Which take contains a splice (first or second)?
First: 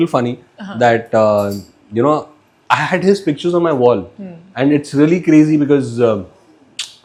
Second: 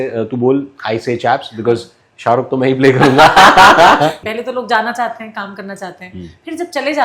second